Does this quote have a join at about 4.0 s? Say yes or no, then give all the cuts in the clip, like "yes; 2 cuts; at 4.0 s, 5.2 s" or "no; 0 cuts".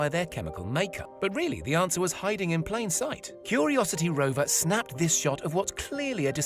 no; 1 cut; at 1.0 s